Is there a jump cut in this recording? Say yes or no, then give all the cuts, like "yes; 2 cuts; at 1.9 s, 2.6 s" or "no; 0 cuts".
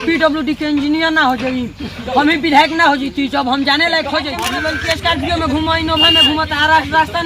yes; 1 cut; at 4.4 s